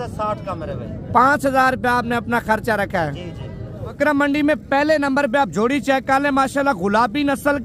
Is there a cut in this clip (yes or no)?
yes